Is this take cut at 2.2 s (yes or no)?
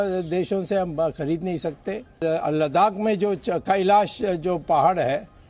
yes